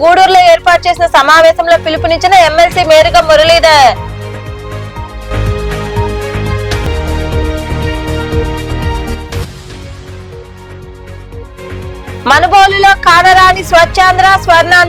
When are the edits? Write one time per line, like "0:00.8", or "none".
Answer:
none